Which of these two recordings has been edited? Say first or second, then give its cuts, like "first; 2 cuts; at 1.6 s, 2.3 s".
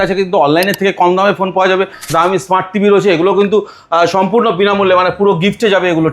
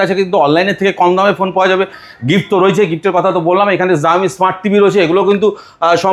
first; 1 cut; at 2.1 s